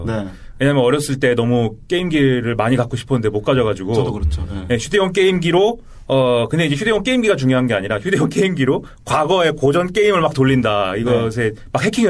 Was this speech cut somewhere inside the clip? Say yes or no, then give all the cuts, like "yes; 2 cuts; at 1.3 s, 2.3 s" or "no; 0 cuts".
yes; 1 cut; at 1.6 s